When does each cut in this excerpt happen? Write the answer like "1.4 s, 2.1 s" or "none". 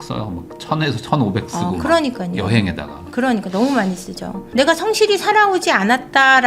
4.3 s